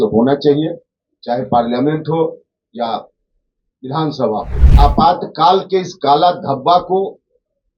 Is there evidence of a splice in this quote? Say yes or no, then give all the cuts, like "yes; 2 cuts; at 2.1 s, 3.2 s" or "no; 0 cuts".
yes; 1 cut; at 4.6 s